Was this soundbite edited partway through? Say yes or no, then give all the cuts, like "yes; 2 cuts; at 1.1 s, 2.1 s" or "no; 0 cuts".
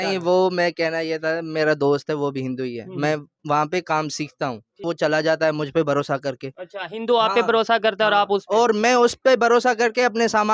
yes; 1 cut; at 4.8 s